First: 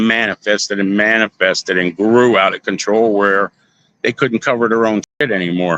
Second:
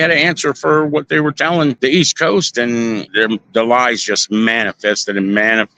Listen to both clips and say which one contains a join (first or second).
second